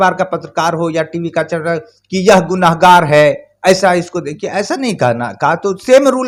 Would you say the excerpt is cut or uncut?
uncut